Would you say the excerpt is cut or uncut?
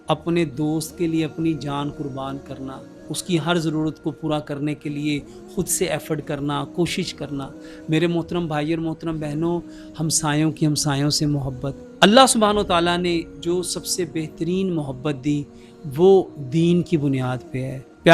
uncut